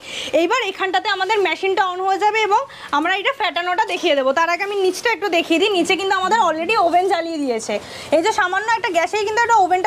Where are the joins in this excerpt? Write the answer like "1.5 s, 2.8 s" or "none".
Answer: none